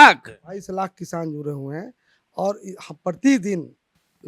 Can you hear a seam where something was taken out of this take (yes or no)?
no